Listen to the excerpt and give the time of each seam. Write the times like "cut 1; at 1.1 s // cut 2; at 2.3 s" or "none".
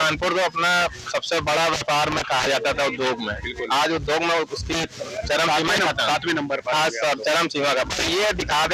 none